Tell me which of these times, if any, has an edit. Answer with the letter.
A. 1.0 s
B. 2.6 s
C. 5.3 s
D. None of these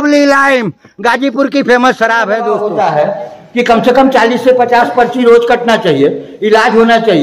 B